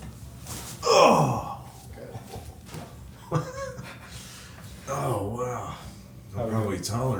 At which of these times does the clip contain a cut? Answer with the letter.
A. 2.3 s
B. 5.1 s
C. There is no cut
C